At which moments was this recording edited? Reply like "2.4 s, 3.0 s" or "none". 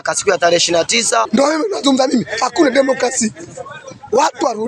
1.3 s